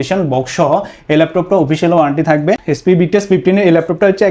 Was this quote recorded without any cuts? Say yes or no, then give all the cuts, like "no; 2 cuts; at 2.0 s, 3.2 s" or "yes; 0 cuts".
no; 1 cut; at 2.7 s